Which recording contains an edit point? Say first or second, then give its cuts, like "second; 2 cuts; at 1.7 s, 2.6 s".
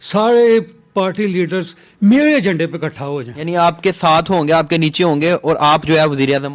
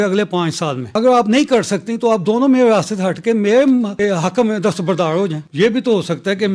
second; 3 cuts; at 0.9 s, 3.9 s, 5.4 s